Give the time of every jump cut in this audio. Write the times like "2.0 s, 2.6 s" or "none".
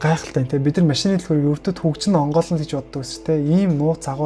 none